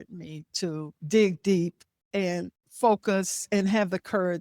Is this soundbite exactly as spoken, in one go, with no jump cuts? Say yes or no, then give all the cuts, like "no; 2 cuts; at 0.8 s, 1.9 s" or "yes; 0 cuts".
yes; 0 cuts